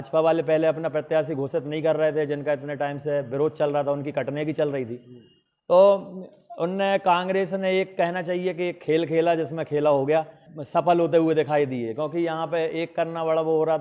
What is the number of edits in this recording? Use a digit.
1